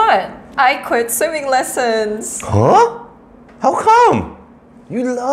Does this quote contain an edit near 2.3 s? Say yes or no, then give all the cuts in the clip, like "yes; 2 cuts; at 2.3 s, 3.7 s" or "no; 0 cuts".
yes; 1 cut; at 2.3 s